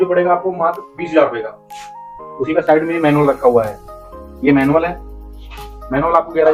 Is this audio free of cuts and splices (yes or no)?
yes